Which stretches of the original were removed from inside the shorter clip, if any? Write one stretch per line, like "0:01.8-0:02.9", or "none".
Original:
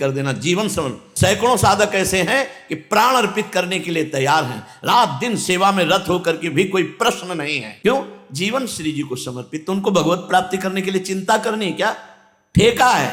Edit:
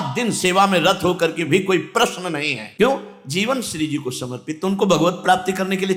none